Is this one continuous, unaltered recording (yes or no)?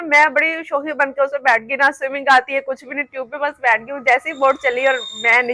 yes